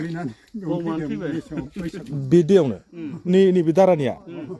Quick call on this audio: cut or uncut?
uncut